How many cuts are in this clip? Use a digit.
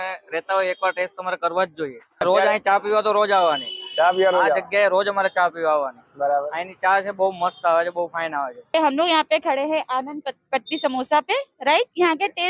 2